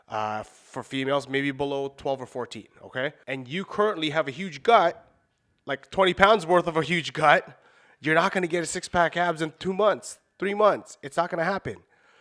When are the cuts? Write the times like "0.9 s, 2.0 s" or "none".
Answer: 3.2 s